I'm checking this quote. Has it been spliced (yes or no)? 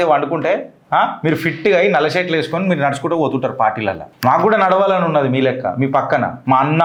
no